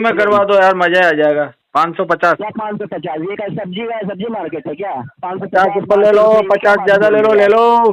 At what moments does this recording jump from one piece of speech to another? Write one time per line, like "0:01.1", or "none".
0:01.6